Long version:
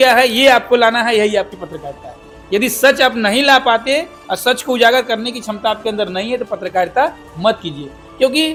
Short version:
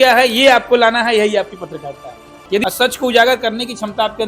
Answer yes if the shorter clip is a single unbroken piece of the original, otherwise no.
no